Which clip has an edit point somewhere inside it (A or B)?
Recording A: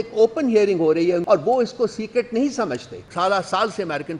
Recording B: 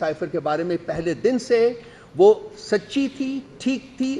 A